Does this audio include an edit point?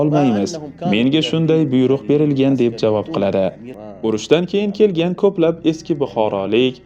yes; 1 cut; at 3.7 s

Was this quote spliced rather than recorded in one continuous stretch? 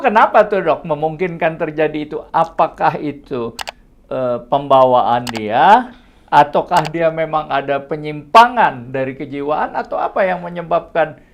no; 0 cuts

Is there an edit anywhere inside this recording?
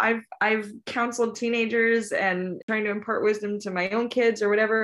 yes; 1 cut; at 2.6 s

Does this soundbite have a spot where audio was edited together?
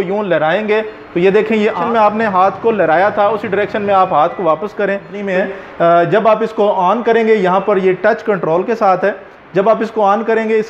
yes; 2 cuts; at 1.8 s, 5.2 s

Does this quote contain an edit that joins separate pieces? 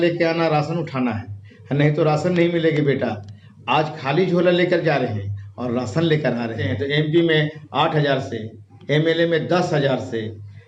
yes; 1 cut; at 6.7 s

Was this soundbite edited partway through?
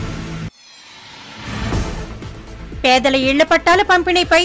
yes; 1 cut; at 1.3 s

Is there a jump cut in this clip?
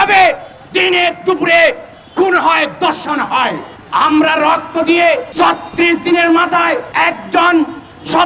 yes; 3 cuts; at 3.7 s, 5.3 s, 6.9 s

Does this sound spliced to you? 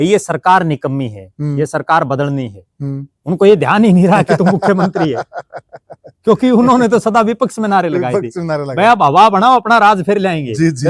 no; 0 cuts

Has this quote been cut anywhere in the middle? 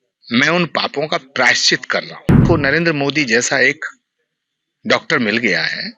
yes; 1 cut; at 2.4 s

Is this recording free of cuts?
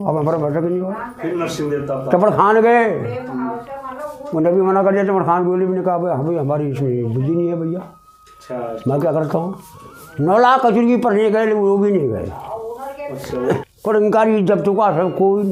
yes; 0 cuts

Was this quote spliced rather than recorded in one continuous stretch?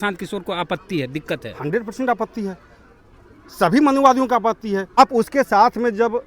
yes; 1 cut; at 5.0 s

